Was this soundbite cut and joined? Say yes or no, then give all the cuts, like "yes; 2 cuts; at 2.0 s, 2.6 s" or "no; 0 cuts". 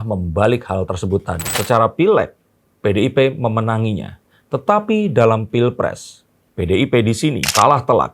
yes; 1 cut; at 1.5 s